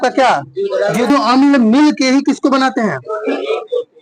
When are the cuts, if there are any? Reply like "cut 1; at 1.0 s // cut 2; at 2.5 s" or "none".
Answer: cut 1; at 1.1 s